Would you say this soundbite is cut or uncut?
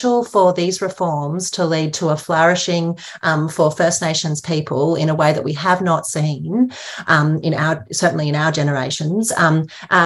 uncut